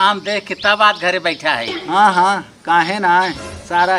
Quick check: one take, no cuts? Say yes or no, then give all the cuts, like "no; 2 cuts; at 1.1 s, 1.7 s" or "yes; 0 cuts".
no; 1 cut; at 1.7 s